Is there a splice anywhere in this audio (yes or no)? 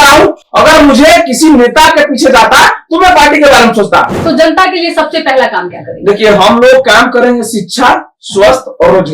yes